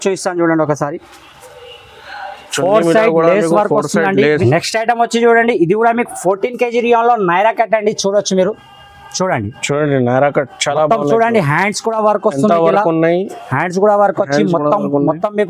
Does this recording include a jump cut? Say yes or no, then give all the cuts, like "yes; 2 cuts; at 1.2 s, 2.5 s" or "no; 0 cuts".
yes; 1 cut; at 4.4 s